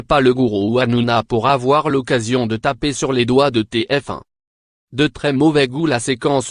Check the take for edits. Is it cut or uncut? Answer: uncut